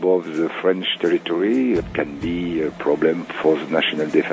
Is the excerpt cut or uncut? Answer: cut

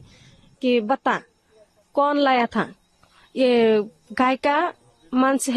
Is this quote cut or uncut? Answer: uncut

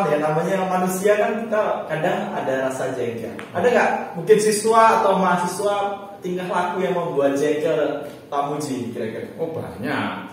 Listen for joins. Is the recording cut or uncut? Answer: uncut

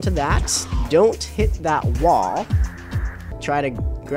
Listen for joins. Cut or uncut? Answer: cut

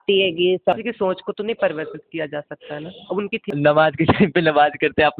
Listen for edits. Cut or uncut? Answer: cut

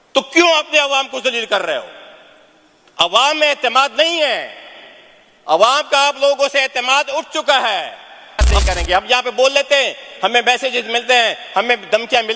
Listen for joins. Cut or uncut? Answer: cut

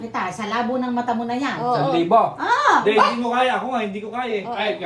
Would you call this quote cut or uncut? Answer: uncut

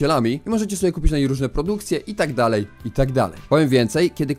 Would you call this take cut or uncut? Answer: cut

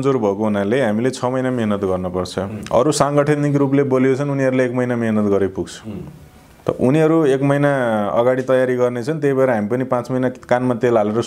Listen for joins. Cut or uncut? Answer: uncut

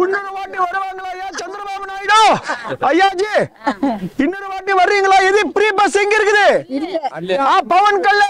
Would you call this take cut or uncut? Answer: uncut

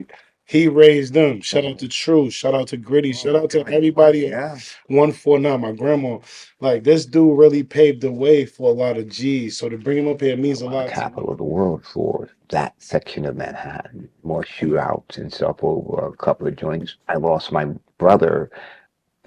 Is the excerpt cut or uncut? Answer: cut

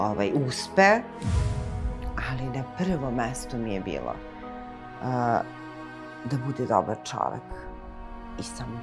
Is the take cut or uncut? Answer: cut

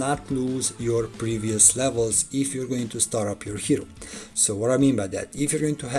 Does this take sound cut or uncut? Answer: uncut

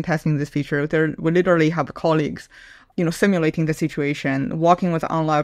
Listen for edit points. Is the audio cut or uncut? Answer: uncut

